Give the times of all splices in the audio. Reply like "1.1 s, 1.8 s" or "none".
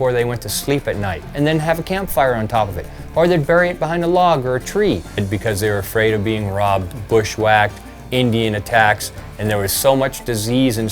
1.3 s, 5.2 s